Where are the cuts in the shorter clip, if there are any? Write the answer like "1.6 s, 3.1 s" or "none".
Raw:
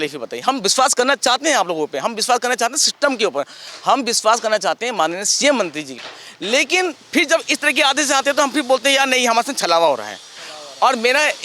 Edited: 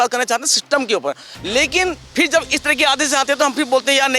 1.3 s